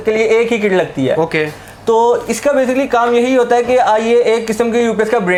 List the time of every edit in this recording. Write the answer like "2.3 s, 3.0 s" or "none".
none